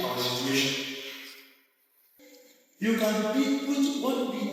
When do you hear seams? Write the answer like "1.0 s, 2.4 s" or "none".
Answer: 2.2 s